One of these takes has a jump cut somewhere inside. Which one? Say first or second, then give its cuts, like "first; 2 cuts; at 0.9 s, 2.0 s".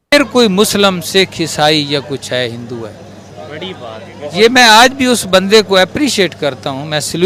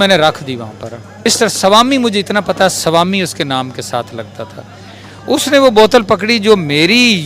second; 1 cut; at 1.1 s